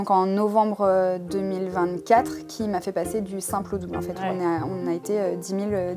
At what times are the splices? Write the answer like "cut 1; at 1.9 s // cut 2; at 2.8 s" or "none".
none